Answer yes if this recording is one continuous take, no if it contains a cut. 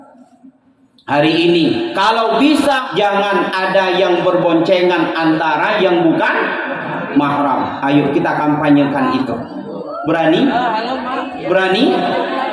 no